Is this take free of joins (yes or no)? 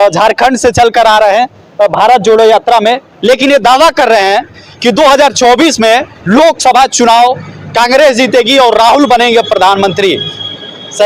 yes